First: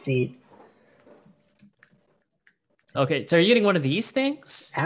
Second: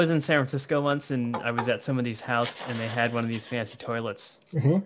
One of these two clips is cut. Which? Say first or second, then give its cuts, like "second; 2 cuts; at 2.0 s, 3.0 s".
first; 1 cut; at 2.8 s